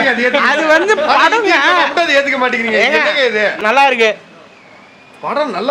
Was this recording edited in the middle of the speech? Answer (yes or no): yes